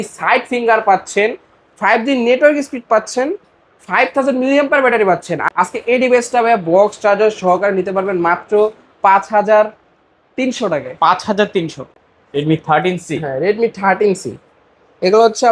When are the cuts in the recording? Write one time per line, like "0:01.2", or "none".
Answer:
0:05.4
0:11.8